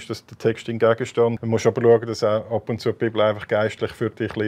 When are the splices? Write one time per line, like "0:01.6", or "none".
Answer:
0:01.4